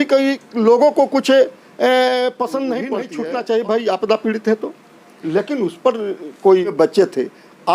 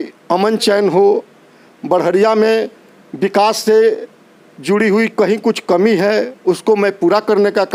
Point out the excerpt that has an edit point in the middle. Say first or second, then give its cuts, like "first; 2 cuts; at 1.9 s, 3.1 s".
first; 2 cuts; at 3.0 s, 6.7 s